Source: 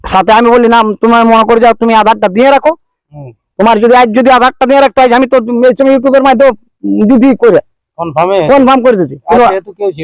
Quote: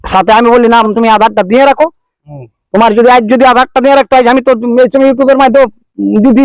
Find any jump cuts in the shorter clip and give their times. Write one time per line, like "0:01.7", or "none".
0:00.9